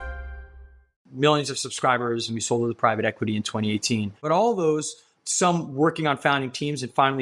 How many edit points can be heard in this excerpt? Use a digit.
1